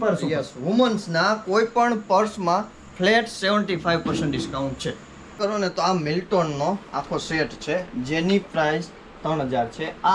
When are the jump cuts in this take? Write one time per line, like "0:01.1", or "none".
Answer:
0:05.3